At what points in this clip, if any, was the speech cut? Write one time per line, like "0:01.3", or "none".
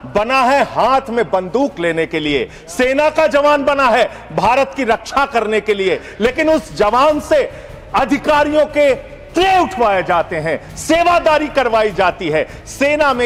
none